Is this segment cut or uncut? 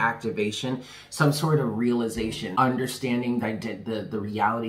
cut